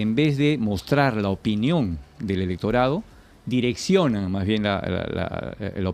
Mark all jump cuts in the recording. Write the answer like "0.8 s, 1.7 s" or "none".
none